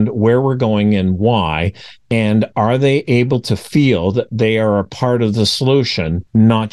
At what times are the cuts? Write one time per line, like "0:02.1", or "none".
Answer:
none